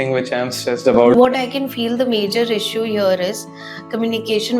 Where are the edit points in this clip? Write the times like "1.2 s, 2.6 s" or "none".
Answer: 1.1 s